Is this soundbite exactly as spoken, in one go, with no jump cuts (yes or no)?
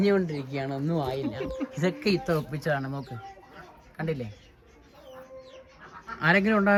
yes